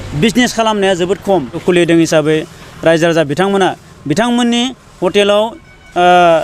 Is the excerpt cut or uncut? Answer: cut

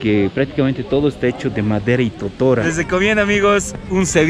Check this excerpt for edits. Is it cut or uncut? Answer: cut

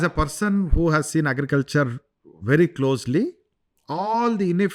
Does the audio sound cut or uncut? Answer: uncut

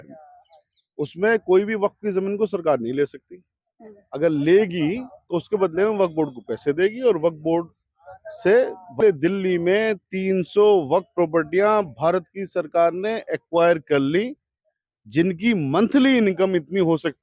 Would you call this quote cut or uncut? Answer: uncut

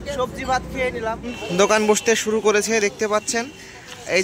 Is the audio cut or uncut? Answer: cut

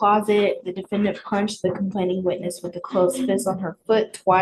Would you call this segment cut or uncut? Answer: uncut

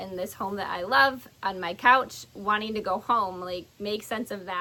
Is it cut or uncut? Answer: uncut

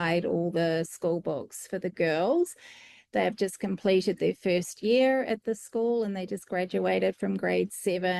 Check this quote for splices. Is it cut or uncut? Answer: uncut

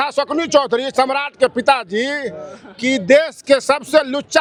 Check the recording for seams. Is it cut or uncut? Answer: uncut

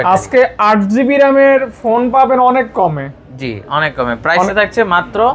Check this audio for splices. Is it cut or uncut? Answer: uncut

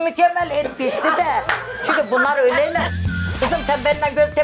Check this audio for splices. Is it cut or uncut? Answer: cut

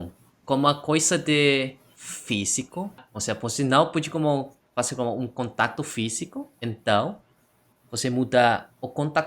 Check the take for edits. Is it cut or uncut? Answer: uncut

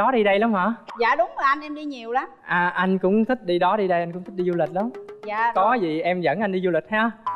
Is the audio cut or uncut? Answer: uncut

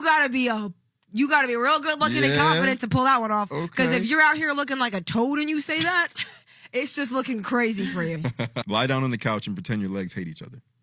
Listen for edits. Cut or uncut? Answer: cut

